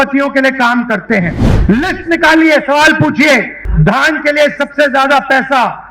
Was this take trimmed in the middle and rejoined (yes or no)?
yes